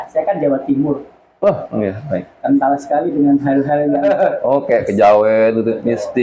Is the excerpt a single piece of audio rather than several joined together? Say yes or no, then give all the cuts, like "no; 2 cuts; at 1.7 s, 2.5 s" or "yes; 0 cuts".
yes; 0 cuts